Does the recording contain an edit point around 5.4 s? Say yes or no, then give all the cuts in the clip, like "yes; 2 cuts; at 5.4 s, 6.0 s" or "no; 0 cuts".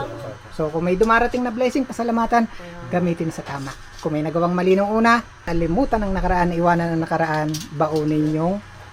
yes; 1 cut; at 5.4 s